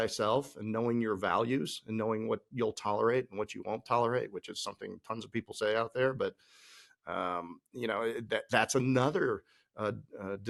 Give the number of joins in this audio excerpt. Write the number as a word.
zero